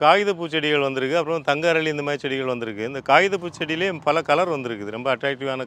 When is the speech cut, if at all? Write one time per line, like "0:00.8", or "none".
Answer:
none